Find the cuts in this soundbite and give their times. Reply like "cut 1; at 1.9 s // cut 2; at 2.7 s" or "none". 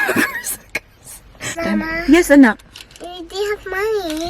cut 1; at 1.5 s